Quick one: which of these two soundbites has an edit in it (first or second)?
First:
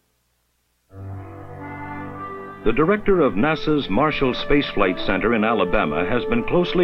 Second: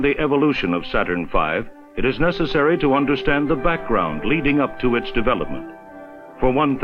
second